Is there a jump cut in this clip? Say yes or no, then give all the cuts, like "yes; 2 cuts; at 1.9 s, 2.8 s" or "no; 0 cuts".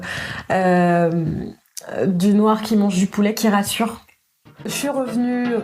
yes; 1 cut; at 4.7 s